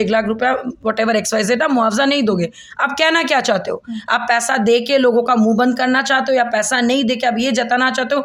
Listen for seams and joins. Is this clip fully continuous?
yes; 0 cuts

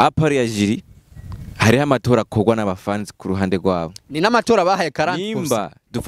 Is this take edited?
no; 0 cuts

